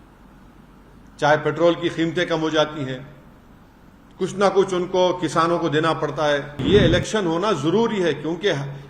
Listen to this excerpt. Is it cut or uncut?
cut